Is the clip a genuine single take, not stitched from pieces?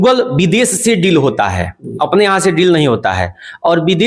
yes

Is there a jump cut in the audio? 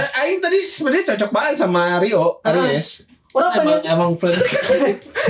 no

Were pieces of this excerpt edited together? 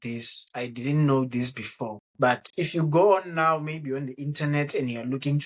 no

